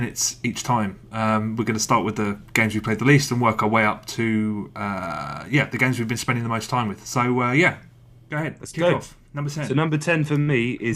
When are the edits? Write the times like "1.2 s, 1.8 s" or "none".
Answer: none

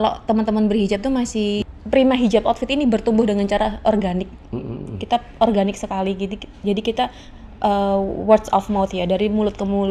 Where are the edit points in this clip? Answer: 1.6 s

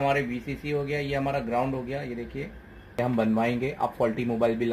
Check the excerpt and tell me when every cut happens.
3.0 s

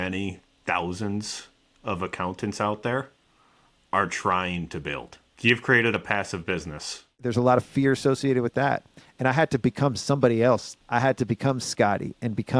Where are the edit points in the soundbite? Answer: 7.2 s, 10.7 s

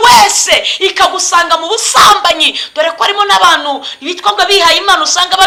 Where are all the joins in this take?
none

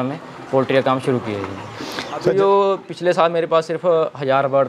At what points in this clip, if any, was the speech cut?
2.2 s

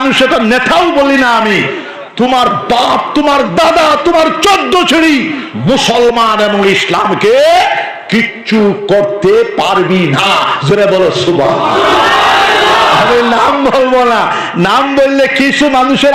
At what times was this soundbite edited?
none

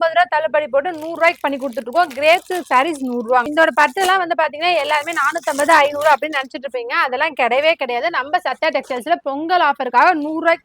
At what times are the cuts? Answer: 3.5 s

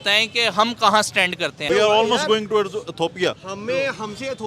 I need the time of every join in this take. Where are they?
1.6 s

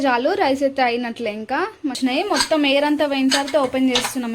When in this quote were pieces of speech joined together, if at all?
2.0 s

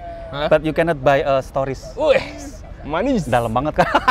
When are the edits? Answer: none

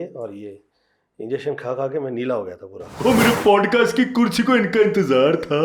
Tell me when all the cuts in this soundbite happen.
2.9 s

